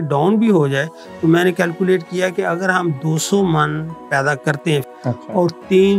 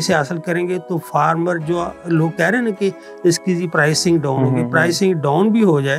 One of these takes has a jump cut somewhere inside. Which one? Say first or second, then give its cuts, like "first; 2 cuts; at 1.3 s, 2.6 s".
first; 1 cut; at 4.9 s